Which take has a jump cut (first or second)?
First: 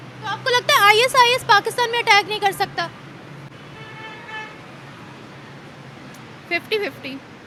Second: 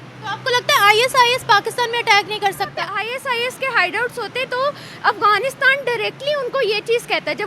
second